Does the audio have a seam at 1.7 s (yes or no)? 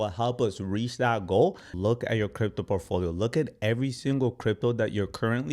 yes